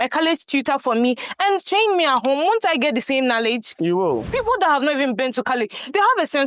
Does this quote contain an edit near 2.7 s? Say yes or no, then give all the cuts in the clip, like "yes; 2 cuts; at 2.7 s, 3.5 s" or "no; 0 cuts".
no; 1 cut; at 4.3 s